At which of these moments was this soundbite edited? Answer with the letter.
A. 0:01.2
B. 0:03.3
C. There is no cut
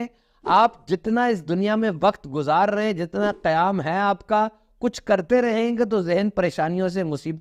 C